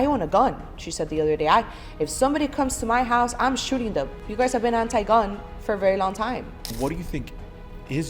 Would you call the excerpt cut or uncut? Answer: cut